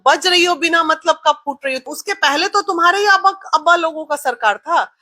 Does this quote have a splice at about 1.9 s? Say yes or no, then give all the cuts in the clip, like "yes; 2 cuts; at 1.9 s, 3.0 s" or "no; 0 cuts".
yes; 1 cut; at 1.9 s